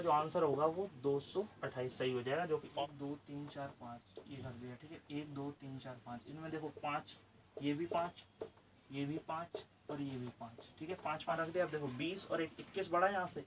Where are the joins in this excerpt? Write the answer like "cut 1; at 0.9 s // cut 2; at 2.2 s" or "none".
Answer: cut 1; at 2.8 s // cut 2; at 11.4 s